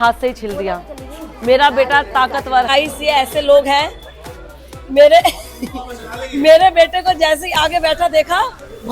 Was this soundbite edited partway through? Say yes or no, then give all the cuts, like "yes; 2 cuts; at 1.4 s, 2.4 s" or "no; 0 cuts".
yes; 1 cut; at 2.7 s